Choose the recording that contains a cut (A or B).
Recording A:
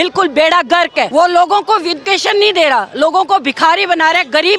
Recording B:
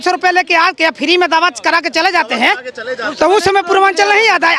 A